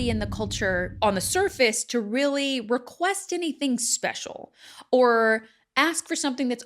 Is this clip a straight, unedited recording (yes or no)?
no